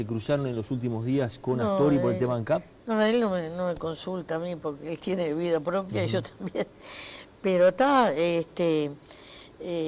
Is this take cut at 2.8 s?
no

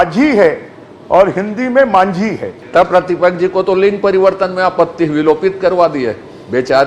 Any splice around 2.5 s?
yes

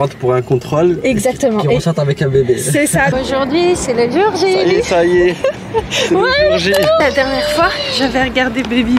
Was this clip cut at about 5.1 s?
no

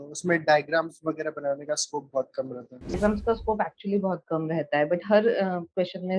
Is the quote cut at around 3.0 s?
yes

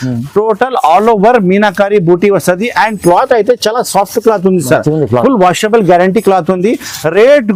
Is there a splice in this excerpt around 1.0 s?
no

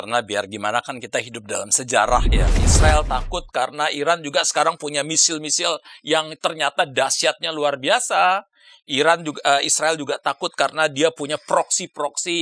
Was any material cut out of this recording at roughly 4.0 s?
no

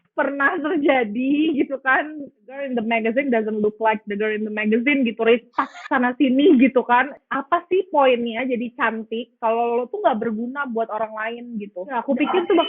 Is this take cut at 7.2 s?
yes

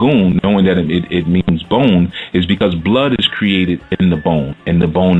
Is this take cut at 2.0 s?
yes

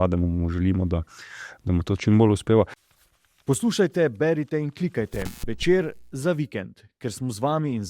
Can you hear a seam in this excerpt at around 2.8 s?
yes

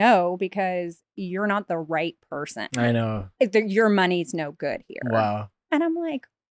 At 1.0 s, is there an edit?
no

